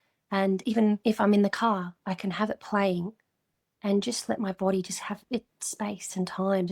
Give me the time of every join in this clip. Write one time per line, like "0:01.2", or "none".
0:01.0